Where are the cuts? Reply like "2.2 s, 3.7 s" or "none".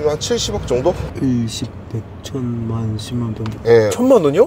1.1 s